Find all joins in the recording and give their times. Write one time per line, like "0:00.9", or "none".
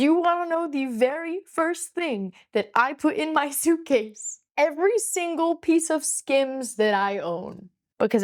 none